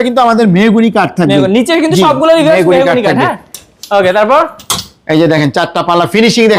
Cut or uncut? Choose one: uncut